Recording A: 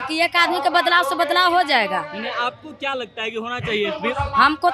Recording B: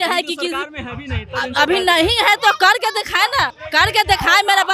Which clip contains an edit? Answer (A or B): B